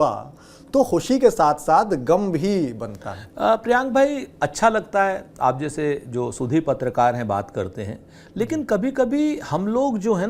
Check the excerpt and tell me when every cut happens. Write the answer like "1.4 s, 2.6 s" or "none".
none